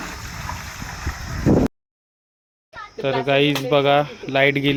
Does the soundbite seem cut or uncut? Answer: uncut